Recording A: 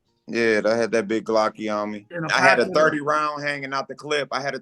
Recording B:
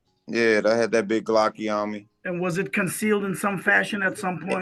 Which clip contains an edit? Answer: A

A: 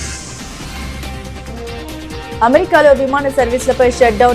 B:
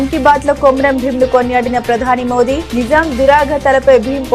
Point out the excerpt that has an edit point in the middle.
A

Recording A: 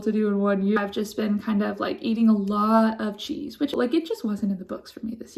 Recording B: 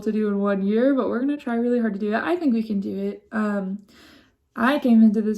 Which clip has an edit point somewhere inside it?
A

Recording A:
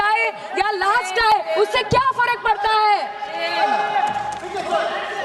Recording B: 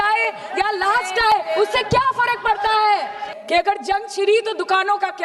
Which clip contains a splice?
B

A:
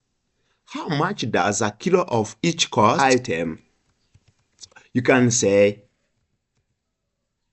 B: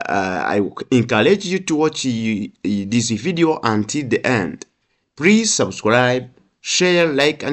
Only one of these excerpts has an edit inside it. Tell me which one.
A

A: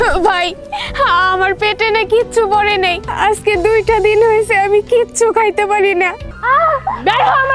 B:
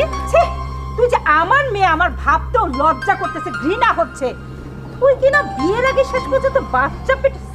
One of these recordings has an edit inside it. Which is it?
A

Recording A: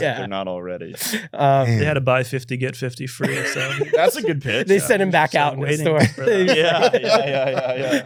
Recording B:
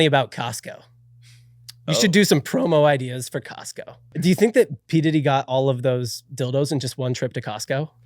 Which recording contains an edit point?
B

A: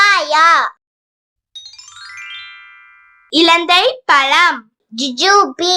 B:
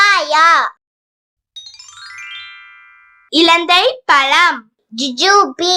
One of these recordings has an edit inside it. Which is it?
B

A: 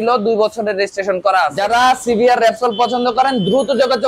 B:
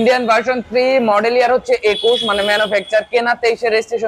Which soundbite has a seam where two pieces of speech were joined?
A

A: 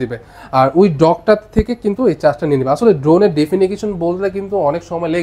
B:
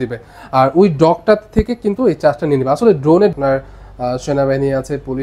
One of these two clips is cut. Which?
B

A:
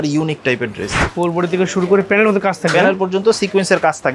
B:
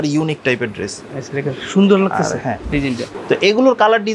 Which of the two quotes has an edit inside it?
A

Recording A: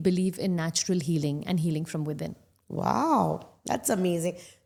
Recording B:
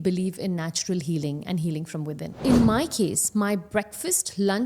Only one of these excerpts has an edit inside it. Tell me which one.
B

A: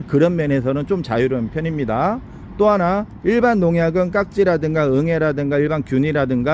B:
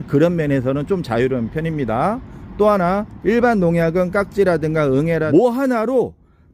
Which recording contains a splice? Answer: B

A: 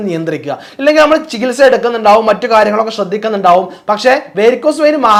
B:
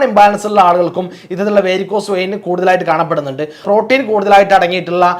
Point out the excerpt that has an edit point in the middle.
B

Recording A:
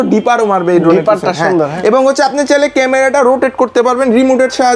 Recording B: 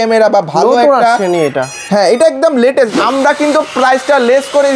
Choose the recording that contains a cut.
B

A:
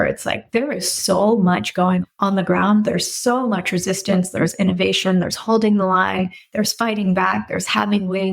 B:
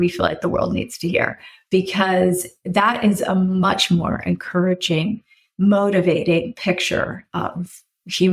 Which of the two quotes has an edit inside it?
A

